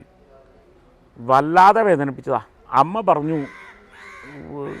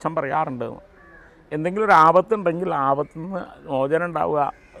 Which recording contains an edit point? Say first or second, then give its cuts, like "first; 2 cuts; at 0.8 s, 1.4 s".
first; 1 cut; at 2.6 s